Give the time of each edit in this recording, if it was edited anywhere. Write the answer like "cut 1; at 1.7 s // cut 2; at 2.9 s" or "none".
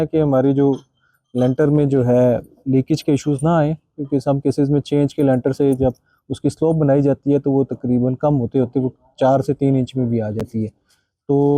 none